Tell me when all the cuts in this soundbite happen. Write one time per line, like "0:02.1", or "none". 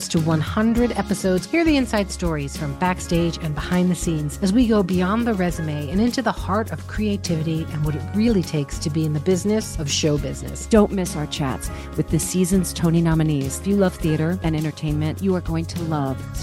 none